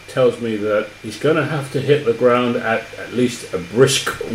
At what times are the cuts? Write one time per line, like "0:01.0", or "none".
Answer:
0:01.0